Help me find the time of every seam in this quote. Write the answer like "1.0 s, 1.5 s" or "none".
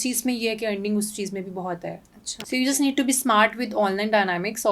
2.3 s